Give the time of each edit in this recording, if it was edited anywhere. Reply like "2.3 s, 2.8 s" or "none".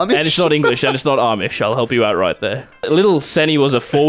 2.9 s